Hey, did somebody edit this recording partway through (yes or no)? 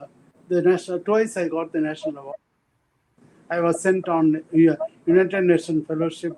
no